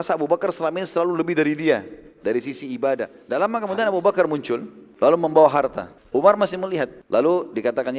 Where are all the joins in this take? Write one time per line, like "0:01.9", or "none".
0:03.2
0:04.8
0:05.9
0:07.0